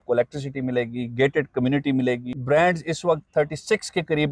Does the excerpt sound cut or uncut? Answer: cut